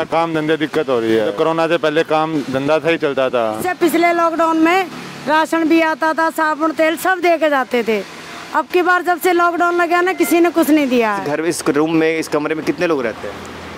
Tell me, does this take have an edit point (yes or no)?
yes